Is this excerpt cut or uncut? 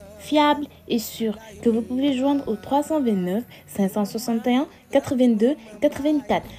uncut